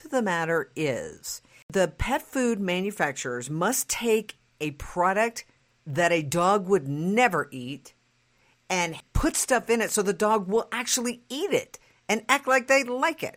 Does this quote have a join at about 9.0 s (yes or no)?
yes